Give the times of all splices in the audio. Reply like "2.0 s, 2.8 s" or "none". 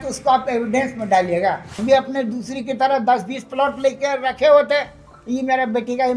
1.8 s